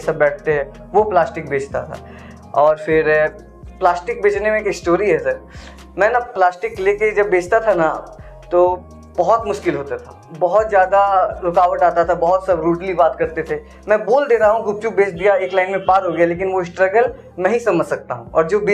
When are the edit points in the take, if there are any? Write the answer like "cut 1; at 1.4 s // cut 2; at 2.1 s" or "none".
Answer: none